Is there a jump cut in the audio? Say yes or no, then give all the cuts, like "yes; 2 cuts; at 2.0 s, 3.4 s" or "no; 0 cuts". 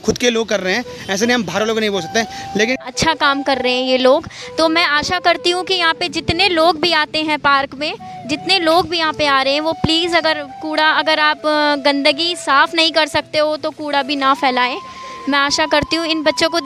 yes; 1 cut; at 2.8 s